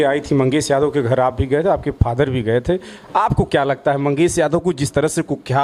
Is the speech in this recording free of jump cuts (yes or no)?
yes